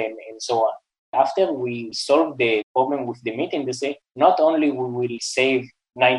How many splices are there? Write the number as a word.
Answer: five